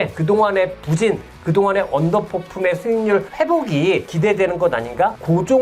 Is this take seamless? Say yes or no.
yes